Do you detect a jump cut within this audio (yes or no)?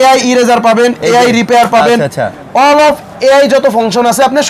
no